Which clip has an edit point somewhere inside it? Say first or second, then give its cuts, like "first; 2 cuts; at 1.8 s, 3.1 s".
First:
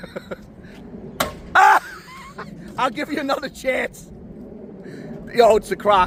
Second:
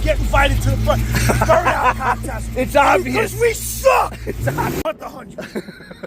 second; 1 cut; at 4.8 s